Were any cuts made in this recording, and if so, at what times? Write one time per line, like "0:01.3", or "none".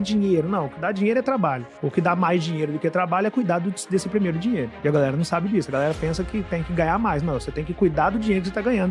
none

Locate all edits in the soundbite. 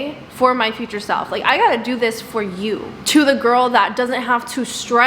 0:03.0

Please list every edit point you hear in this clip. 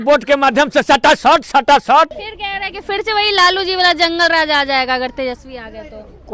0:02.2

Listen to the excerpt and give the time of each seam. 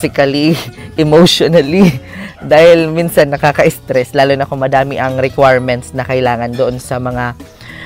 none

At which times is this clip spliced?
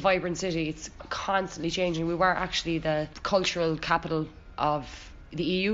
0:00.9

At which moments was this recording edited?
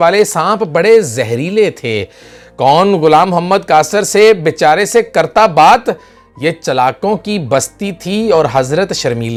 none

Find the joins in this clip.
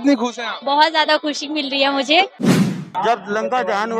0:02.6

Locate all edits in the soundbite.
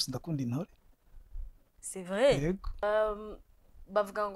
0:02.8

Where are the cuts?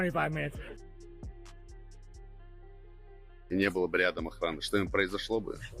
0:00.8
0:03.3

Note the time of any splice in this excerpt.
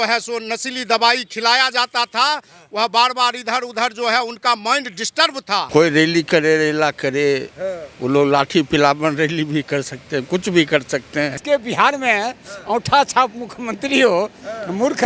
0:05.7
0:11.4

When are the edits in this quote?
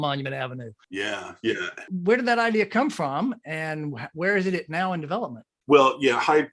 none

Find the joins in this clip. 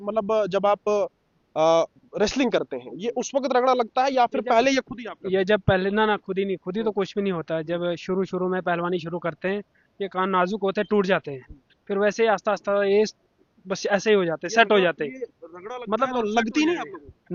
none

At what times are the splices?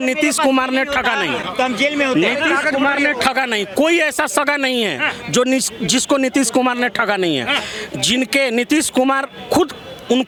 none

